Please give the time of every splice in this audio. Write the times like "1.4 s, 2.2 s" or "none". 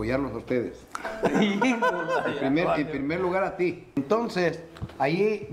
4.0 s